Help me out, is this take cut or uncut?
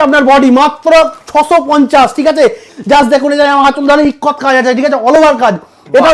cut